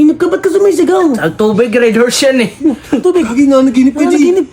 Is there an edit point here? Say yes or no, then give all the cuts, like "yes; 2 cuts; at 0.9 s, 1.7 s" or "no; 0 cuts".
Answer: yes; 1 cut; at 3.0 s